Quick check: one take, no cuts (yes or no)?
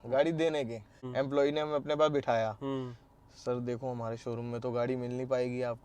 no